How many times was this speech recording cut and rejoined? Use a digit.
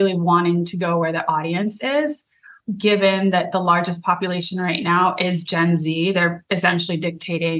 1